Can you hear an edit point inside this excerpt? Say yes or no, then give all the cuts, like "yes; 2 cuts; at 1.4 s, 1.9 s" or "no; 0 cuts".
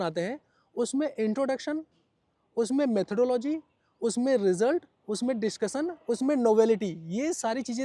no; 0 cuts